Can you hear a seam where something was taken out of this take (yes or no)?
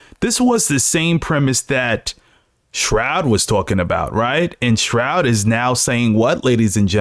no